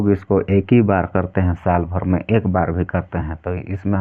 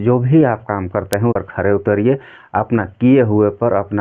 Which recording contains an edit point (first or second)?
second